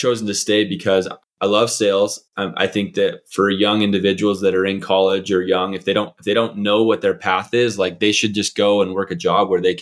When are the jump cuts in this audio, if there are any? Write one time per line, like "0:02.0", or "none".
0:01.2